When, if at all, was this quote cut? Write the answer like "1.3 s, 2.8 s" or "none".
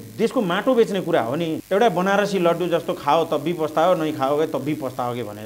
1.6 s